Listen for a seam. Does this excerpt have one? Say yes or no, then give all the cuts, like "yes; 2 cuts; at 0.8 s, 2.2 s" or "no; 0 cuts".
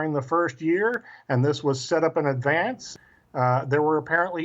yes; 1 cut; at 2.8 s